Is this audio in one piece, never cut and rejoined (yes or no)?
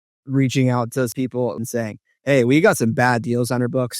no